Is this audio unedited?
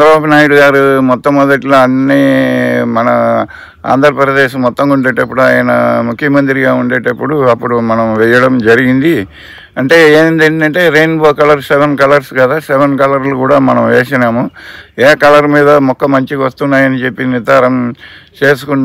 yes; 0 cuts

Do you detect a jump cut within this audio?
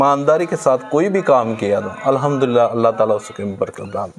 no; 0 cuts

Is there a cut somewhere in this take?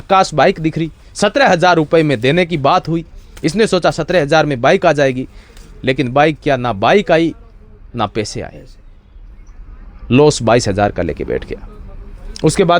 no; 0 cuts

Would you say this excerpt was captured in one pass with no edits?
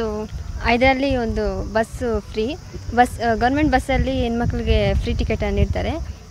yes; 0 cuts

